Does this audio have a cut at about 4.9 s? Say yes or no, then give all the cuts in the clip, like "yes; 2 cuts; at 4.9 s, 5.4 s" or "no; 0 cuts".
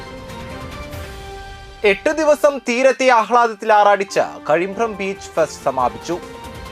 no; 1 cut; at 1.1 s